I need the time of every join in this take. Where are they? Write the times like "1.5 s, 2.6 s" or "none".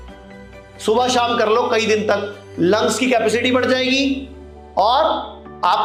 none